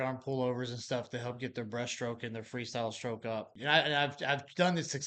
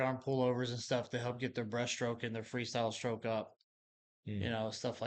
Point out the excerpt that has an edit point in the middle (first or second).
first